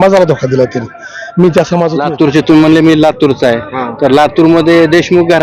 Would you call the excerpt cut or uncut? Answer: cut